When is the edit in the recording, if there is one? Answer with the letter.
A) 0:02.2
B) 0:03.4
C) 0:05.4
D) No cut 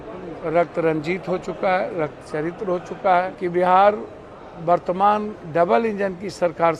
B